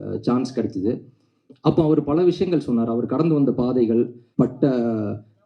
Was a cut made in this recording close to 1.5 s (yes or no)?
no